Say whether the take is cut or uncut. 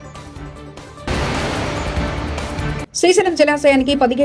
cut